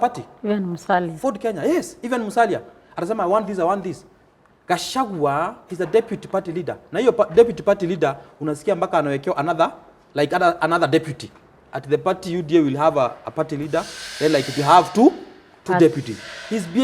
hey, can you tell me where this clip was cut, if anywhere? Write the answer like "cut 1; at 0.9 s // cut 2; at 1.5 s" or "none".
none